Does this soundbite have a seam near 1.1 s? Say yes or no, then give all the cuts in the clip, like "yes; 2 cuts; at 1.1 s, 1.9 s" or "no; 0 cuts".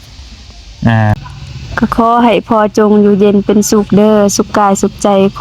yes; 1 cut; at 1.1 s